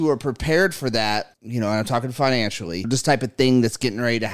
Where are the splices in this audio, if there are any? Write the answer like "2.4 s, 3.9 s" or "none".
1.4 s, 2.9 s